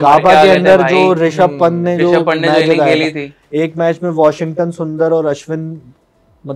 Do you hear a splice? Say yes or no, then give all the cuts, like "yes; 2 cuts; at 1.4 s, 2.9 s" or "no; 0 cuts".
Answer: no; 0 cuts